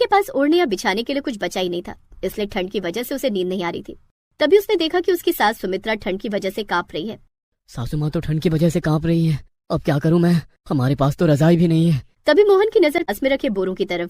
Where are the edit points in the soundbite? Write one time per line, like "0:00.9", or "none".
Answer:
0:13.1